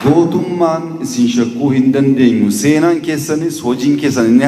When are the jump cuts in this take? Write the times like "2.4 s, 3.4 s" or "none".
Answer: none

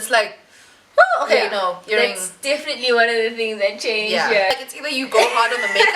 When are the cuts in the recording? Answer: 4.5 s

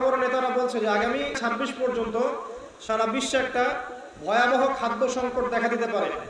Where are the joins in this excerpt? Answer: 1.4 s

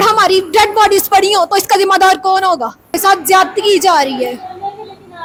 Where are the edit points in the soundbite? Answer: none

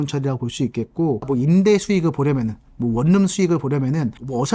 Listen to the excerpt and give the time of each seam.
1.2 s

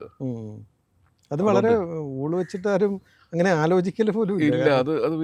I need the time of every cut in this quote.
none

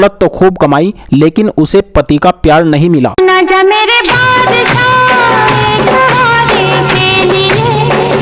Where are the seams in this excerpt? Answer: none

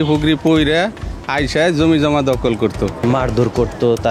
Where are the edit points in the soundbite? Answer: 3.0 s

